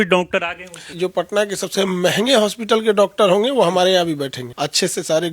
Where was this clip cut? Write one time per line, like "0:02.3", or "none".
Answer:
0:00.9
0:04.4